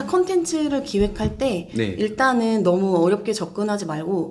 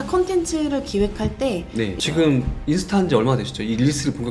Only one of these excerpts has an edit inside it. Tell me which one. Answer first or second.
second